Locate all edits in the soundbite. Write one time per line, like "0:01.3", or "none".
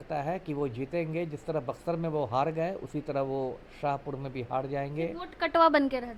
none